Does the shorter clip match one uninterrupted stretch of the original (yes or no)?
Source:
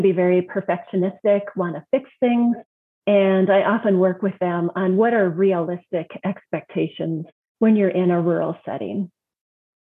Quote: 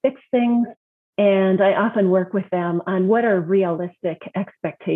yes